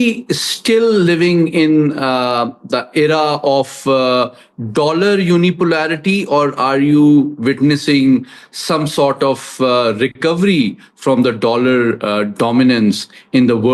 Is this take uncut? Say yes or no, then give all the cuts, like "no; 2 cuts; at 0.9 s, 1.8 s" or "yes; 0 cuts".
yes; 0 cuts